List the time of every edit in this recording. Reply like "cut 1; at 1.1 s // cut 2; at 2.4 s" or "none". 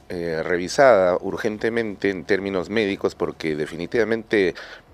none

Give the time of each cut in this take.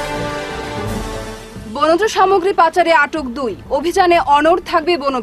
cut 1; at 1.1 s

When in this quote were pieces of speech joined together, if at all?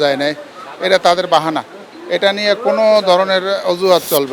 none

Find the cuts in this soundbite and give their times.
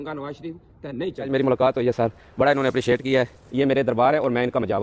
cut 1; at 1.3 s // cut 2; at 3.4 s

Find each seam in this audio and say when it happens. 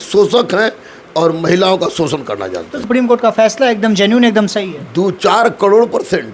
cut 1; at 2.8 s

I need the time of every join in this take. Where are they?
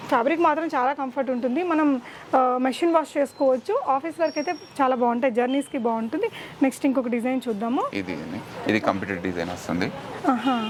none

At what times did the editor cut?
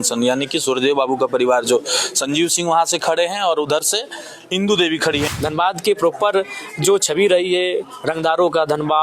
cut 1; at 5.3 s

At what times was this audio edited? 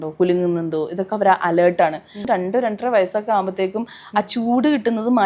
cut 1; at 2.3 s

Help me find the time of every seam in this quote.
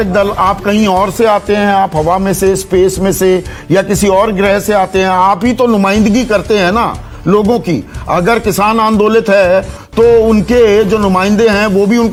none

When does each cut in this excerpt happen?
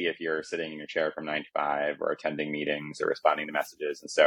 none

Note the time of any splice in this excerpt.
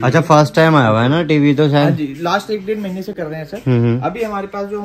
none

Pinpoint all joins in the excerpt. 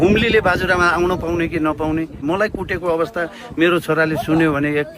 cut 1; at 2.2 s

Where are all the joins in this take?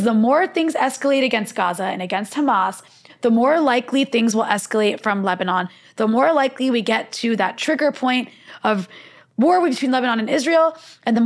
none

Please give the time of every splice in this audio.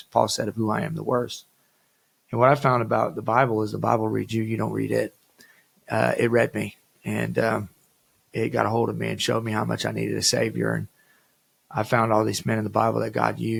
none

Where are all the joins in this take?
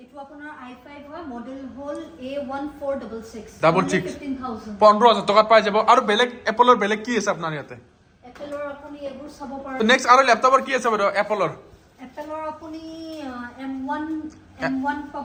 none

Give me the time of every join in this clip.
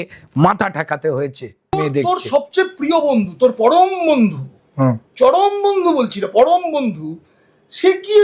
cut 1; at 1.7 s

